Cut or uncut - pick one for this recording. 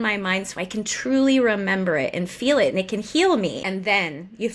cut